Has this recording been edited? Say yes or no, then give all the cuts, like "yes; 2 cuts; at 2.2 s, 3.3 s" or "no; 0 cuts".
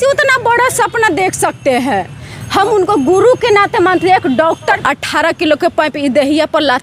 yes; 1 cut; at 4.8 s